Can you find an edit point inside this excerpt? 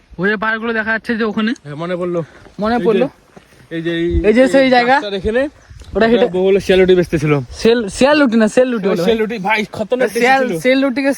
no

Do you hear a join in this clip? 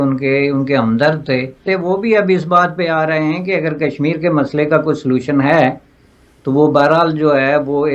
yes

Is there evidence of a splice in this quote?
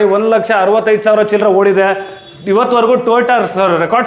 no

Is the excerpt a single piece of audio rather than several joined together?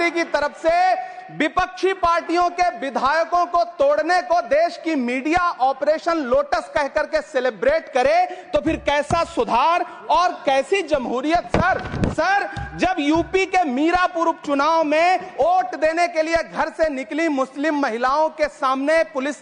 yes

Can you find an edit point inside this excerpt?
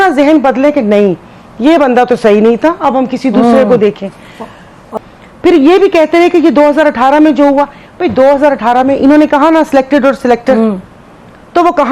yes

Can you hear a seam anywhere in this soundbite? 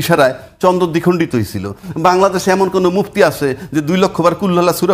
no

